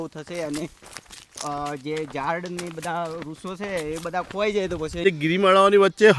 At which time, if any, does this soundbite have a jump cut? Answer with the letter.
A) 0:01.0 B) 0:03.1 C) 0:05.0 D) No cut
C